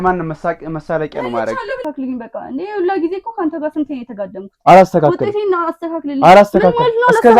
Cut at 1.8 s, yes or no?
yes